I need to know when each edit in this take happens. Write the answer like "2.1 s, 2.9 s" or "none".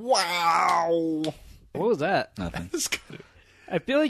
1.6 s